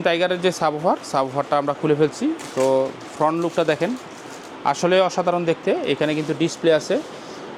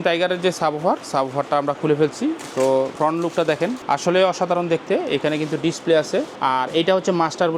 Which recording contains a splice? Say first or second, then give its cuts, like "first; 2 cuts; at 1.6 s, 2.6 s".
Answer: second; 3 cuts; at 2.9 s, 3.8 s, 6.3 s